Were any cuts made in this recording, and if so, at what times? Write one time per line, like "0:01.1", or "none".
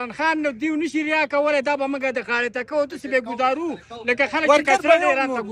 none